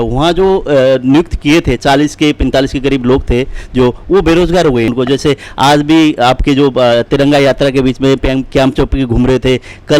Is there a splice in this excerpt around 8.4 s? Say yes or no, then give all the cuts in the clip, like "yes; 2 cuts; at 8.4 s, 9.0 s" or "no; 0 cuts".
no; 1 cut; at 4.9 s